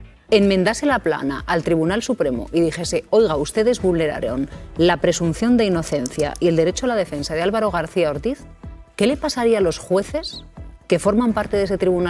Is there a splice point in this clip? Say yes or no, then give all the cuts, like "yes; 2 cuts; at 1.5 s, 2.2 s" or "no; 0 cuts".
no; 0 cuts